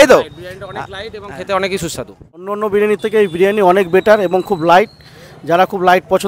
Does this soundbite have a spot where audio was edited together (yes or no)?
yes